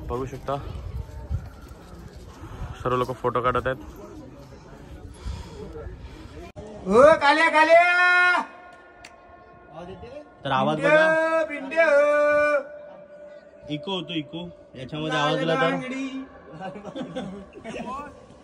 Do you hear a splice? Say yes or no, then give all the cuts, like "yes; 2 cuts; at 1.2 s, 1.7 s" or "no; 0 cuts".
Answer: yes; 1 cut; at 6.5 s